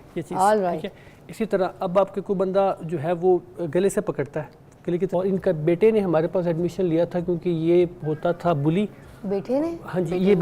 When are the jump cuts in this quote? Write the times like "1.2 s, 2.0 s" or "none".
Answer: 5.1 s